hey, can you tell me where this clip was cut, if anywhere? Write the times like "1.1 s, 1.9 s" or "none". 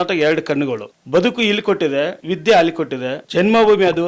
0.9 s, 2.2 s, 3.2 s